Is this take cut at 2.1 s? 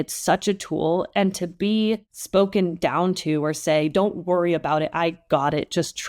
yes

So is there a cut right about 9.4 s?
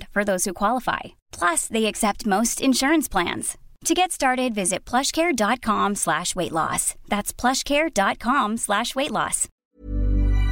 yes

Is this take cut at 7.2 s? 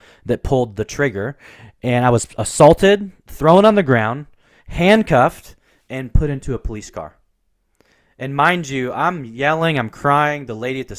no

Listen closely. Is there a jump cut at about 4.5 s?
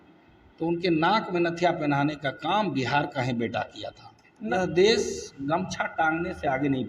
yes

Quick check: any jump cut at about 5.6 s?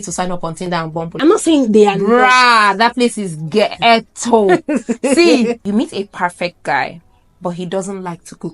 yes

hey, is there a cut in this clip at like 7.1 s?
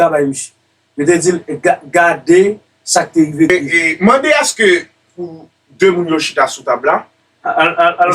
no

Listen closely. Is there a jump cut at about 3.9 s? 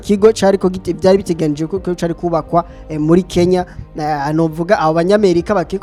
no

